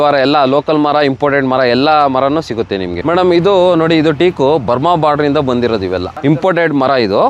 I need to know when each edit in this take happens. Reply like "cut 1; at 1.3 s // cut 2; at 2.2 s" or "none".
cut 1; at 3.0 s // cut 2; at 6.1 s